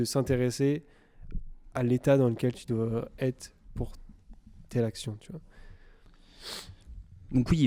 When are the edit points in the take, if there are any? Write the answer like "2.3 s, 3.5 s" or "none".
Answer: none